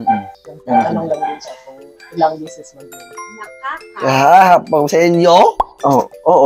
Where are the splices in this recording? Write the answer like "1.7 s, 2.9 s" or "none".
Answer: 3.1 s